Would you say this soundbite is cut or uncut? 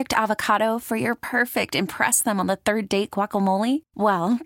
uncut